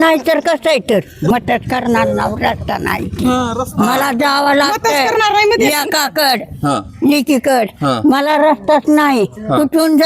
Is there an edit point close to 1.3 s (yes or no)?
yes